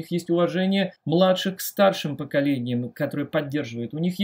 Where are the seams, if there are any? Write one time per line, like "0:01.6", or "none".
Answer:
0:01.0